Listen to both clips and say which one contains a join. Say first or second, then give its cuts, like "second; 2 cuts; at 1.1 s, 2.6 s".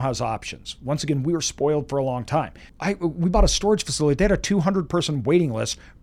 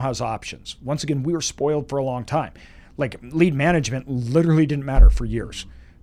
first; 1 cut; at 2.6 s